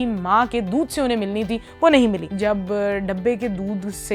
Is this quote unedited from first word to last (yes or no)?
no